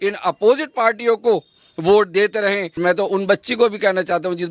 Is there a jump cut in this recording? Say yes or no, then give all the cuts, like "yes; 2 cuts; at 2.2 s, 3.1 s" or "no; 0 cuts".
yes; 1 cut; at 2.8 s